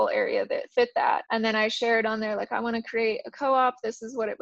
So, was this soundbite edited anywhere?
yes; 1 cut; at 1.2 s

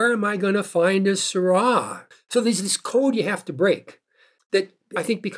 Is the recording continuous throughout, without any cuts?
yes; 0 cuts

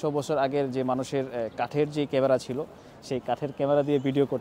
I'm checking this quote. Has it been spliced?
no; 0 cuts

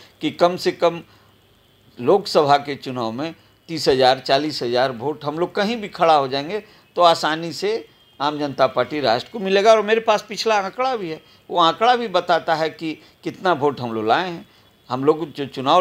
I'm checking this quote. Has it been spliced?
no; 0 cuts

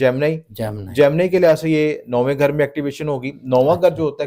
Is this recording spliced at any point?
no; 0 cuts

